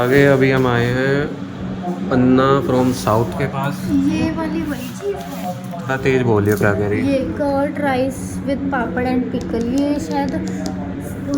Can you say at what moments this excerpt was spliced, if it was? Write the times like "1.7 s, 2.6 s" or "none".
none